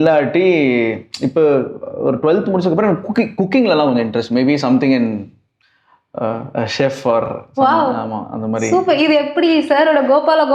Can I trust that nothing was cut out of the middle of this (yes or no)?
yes